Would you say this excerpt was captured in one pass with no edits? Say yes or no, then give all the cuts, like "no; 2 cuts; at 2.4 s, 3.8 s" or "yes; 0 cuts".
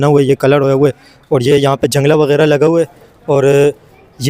yes; 0 cuts